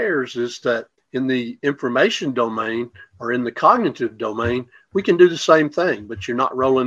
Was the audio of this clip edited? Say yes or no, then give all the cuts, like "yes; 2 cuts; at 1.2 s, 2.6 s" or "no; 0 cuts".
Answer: yes; 1 cut; at 1.0 s